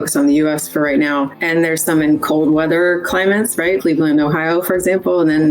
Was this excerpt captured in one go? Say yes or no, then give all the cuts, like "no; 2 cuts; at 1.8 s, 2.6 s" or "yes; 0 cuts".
no; 1 cut; at 1.4 s